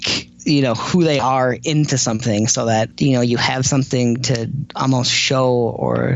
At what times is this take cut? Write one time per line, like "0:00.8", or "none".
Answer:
0:02.9
0:04.6